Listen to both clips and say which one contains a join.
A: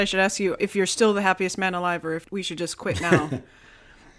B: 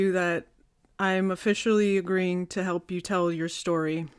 A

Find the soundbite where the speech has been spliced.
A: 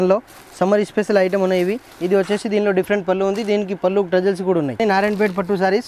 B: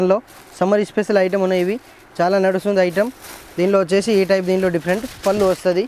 A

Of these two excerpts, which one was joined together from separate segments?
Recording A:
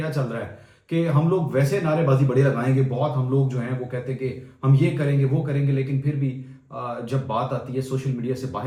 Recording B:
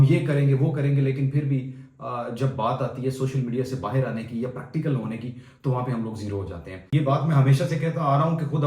B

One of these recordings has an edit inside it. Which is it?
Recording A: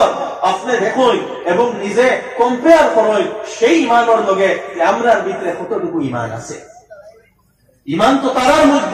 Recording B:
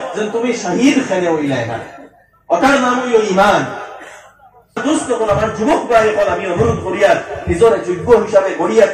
B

